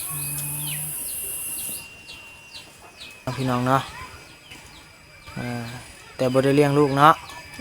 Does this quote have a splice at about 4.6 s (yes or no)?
no